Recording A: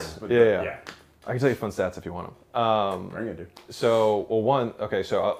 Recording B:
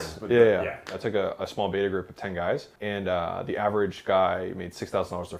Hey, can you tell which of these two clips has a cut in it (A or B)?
B